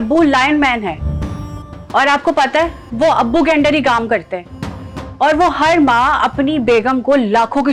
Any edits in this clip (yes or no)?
no